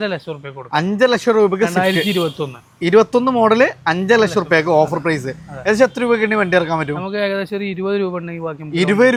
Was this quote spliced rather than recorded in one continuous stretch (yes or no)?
no